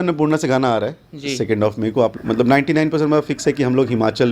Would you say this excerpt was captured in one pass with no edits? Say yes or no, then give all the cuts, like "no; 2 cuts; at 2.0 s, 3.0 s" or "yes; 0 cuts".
no; 1 cut; at 2.2 s